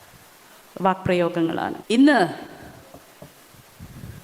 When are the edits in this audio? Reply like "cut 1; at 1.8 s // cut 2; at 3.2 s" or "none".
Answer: cut 1; at 1.7 s